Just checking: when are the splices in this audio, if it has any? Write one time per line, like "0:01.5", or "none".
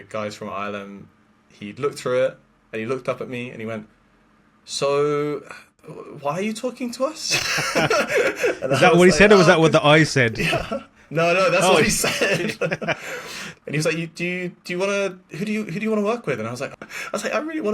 0:16.6